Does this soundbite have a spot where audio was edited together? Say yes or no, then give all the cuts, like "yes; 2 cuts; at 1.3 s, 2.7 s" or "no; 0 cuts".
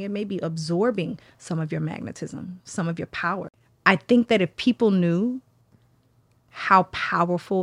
yes; 1 cut; at 3.5 s